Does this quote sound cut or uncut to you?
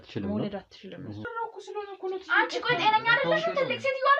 cut